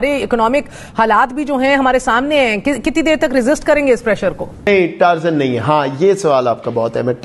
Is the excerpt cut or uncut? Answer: cut